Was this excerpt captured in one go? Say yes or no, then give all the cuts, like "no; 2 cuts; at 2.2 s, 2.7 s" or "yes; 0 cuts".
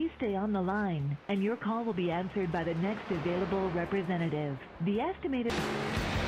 yes; 0 cuts